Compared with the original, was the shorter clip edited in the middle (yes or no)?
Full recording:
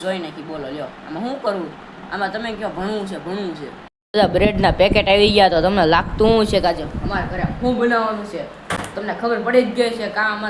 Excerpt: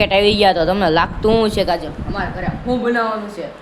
no